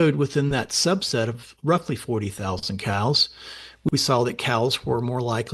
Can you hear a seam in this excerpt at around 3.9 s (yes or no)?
yes